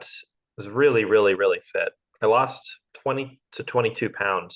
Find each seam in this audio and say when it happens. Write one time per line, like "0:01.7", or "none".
0:03.0